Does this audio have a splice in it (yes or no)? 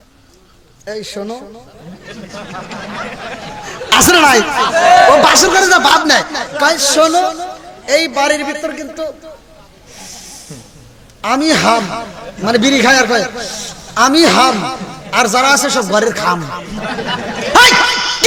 no